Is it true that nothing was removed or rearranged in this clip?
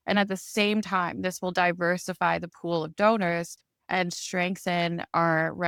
yes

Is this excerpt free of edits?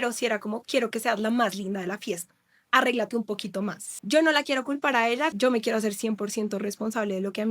no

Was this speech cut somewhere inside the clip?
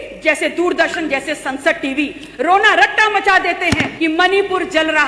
yes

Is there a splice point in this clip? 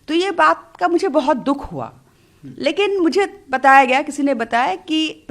no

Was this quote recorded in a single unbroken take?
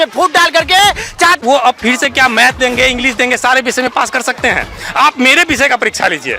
no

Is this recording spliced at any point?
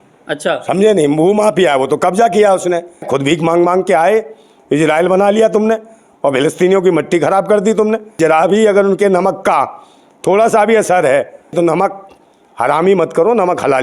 yes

